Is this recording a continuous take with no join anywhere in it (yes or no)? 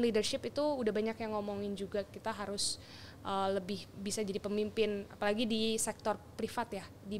yes